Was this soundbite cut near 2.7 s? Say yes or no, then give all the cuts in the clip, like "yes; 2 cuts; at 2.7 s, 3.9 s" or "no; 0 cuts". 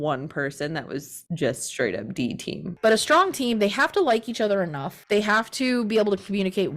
yes; 1 cut; at 2.7 s